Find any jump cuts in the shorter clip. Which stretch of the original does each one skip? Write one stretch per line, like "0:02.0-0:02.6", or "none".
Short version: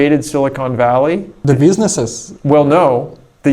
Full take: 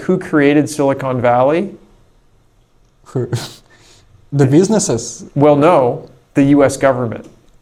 0:01.8-0:04.2